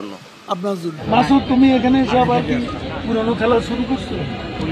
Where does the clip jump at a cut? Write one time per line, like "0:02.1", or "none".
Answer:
0:01.0